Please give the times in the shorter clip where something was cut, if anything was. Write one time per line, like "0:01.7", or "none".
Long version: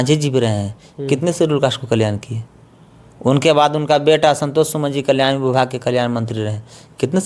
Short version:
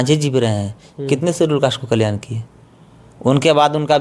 none